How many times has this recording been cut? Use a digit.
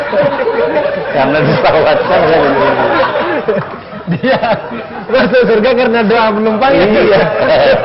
0